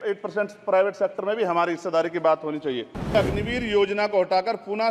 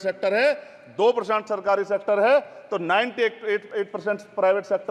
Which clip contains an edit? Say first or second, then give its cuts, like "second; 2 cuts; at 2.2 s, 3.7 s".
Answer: first; 1 cut; at 3.1 s